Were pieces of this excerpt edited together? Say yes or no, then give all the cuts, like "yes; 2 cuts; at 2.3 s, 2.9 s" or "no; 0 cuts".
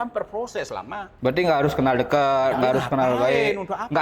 yes; 1 cut; at 1.1 s